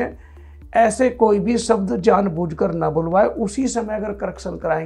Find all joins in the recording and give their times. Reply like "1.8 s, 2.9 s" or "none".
none